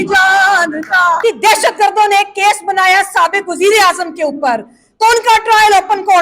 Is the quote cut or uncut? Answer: cut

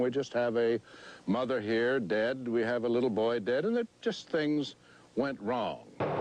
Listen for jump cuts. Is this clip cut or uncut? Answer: uncut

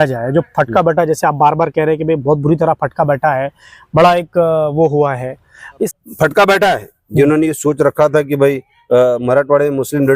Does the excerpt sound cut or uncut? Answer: cut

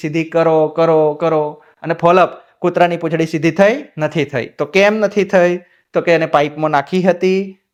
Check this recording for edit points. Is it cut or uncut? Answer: uncut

